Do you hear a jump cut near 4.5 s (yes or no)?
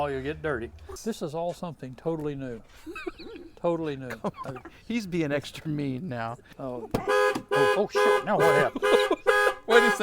no